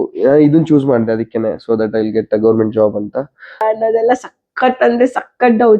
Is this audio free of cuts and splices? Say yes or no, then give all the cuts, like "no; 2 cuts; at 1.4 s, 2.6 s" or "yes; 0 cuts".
no; 1 cut; at 3.6 s